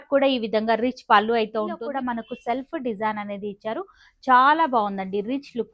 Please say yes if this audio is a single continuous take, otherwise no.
no